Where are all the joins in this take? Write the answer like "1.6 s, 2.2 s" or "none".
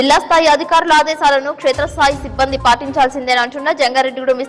none